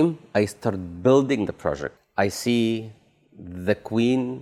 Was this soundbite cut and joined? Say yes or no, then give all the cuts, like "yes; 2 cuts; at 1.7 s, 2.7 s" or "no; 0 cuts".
yes; 1 cut; at 2.0 s